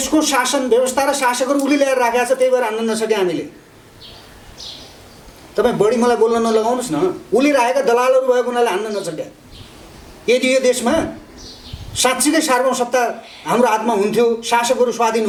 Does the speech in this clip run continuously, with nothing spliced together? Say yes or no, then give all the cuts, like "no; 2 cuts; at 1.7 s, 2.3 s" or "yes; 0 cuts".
yes; 0 cuts